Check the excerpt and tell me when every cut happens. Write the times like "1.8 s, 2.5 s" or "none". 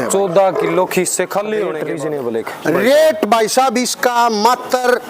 1.8 s